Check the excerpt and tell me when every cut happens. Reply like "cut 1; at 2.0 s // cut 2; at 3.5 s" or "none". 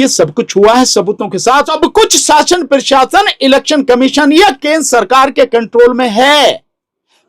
cut 1; at 1.7 s